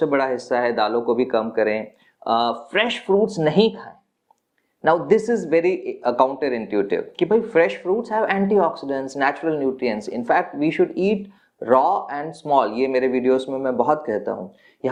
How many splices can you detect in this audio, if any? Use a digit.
0